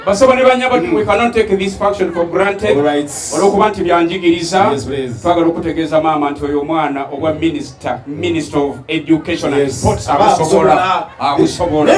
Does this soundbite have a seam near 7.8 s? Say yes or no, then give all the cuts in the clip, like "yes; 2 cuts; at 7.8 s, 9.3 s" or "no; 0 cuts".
no; 0 cuts